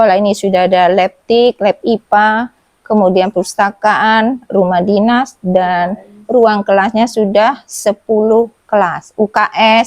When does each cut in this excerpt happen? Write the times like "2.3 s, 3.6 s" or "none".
none